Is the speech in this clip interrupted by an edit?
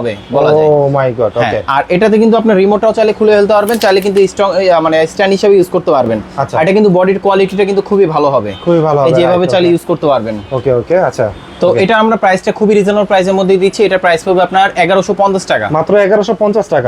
no; 0 cuts

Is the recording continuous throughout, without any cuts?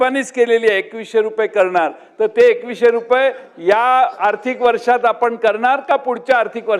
yes; 0 cuts

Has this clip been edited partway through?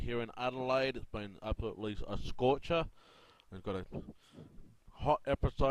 no; 0 cuts

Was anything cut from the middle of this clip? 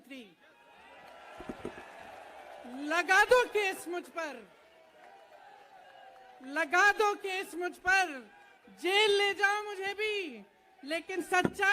yes; 1 cut; at 2.5 s

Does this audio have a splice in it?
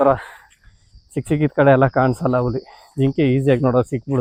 no; 0 cuts

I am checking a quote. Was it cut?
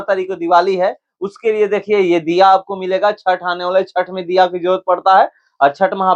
no; 0 cuts

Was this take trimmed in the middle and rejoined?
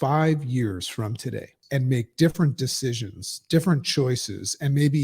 yes; 1 cut; at 1.5 s

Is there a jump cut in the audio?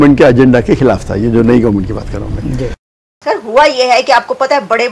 yes; 1 cut; at 3.2 s

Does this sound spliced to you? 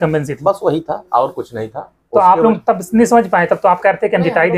no; 0 cuts

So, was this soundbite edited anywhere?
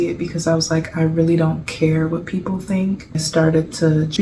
yes; 1 cut; at 3.2 s

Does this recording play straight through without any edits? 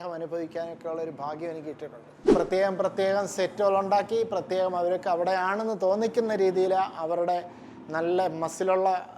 no; 1 cut; at 2.3 s

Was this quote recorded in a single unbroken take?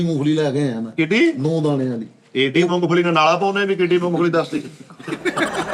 yes; 0 cuts

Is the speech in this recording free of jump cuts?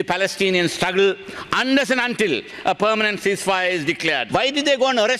no; 1 cut; at 4.2 s

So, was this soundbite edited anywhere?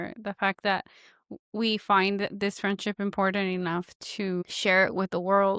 yes; 1 cut; at 4.5 s

